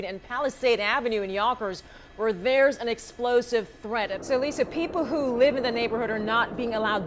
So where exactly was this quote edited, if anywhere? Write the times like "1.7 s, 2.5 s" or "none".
4.2 s